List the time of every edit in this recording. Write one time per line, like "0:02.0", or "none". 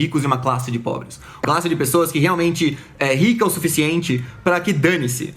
0:01.4